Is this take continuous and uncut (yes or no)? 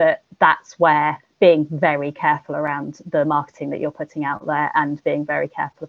yes